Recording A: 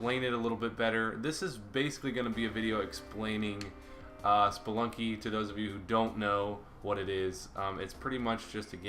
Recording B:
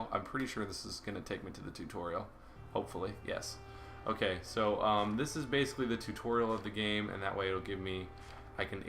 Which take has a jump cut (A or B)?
B